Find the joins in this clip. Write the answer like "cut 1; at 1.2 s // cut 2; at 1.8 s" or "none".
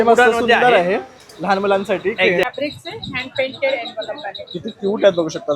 cut 1; at 2.4 s